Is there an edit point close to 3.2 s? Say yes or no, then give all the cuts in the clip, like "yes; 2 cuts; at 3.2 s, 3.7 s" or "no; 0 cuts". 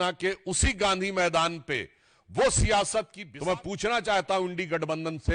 yes; 1 cut; at 3.2 s